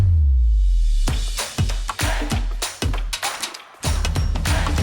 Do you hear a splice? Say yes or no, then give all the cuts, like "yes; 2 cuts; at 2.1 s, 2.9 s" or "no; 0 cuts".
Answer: yes; 1 cut; at 3.4 s